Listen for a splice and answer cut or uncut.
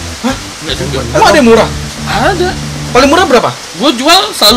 cut